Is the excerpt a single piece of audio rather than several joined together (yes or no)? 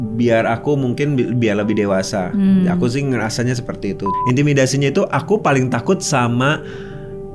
no